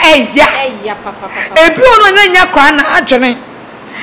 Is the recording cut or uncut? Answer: uncut